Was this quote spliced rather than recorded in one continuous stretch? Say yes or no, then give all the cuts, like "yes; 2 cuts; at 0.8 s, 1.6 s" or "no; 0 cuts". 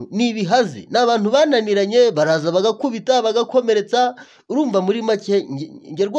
no; 0 cuts